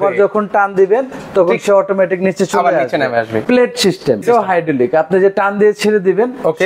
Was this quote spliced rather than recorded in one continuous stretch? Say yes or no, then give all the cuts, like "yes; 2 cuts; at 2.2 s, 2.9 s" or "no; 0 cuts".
yes; 2 cuts; at 3.4 s, 4.2 s